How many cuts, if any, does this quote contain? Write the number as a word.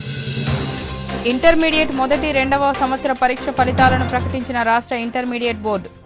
one